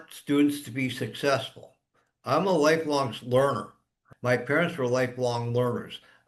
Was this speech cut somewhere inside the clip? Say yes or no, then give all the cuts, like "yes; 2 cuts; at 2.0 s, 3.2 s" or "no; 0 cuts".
no; 0 cuts